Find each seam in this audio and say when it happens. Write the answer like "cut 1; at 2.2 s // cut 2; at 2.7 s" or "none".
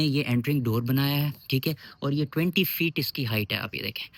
none